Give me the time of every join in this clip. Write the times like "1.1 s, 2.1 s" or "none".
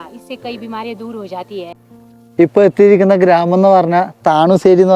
1.8 s